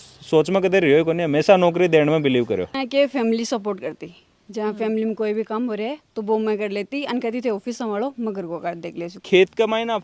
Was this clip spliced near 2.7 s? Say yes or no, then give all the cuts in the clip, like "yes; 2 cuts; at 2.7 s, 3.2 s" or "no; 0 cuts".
yes; 2 cuts; at 2.7 s, 9.2 s